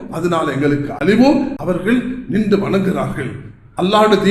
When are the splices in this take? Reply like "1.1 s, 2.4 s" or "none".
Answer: 1.5 s